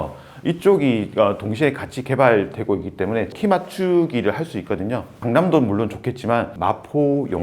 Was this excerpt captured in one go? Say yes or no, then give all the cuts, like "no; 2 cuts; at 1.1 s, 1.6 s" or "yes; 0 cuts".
no; 2 cuts; at 3.3 s, 5.2 s